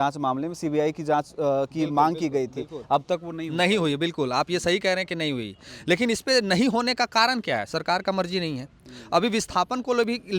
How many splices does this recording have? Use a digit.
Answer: 0